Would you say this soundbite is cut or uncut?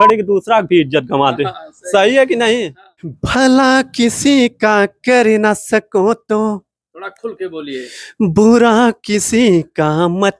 cut